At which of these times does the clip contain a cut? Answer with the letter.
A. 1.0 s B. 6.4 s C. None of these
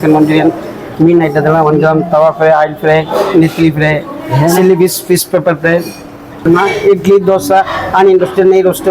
B